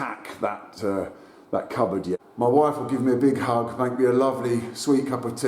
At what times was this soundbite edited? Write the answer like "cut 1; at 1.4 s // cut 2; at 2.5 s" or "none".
cut 1; at 2.3 s